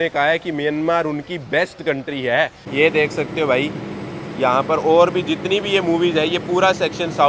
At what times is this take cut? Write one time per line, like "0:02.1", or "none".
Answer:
0:02.7